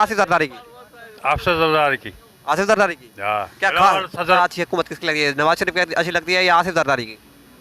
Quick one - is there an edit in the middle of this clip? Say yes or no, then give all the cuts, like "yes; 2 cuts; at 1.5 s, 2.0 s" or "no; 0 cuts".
yes; 1 cut; at 4.3 s